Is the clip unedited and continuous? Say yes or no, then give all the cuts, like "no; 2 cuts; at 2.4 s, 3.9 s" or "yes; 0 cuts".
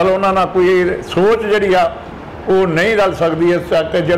yes; 0 cuts